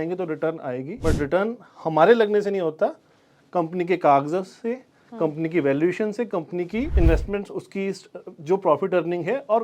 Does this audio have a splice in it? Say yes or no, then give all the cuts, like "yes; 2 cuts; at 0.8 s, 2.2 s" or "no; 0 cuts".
yes; 2 cuts; at 0.9 s, 6.9 s